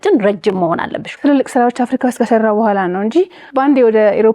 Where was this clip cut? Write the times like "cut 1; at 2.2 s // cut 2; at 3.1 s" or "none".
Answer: cut 1; at 1.1 s // cut 2; at 3.4 s